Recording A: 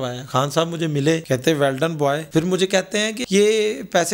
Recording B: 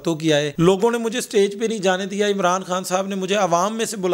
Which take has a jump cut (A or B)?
A